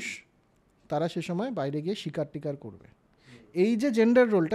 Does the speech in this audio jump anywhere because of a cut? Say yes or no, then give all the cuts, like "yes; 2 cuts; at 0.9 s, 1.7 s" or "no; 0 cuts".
no; 0 cuts